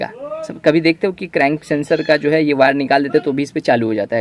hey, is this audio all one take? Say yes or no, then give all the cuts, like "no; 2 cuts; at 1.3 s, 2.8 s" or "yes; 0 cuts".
yes; 0 cuts